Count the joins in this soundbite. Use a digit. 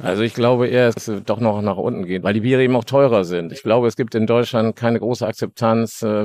2